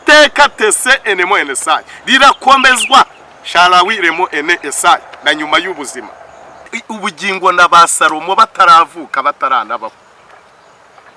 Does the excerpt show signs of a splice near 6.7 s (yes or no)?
yes